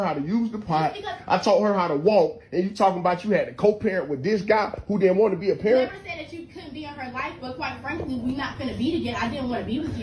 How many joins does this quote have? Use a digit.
0